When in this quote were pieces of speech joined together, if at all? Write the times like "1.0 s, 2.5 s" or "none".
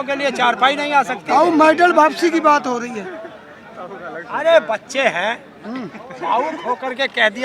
none